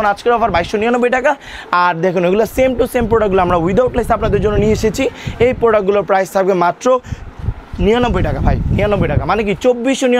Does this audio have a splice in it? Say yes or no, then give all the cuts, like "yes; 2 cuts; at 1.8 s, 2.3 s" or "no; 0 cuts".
no; 0 cuts